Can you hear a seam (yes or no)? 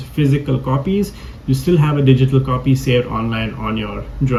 no